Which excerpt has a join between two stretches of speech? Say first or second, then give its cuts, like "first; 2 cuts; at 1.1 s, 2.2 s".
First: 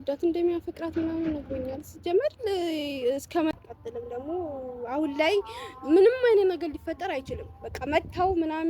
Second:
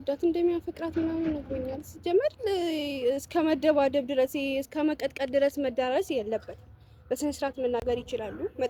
first; 1 cut; at 3.5 s